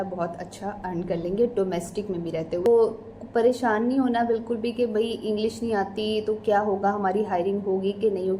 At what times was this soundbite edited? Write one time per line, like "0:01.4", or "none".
0:02.7